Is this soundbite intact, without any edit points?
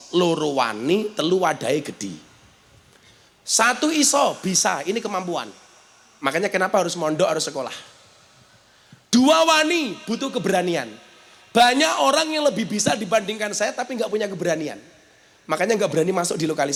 yes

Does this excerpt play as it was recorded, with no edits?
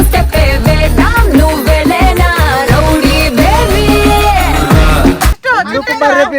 no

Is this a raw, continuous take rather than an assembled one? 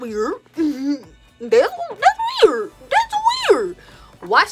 yes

